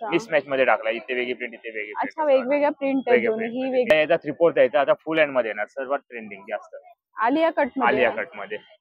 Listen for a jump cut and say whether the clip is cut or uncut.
cut